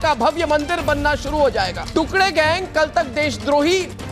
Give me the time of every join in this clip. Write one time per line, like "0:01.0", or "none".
0:01.8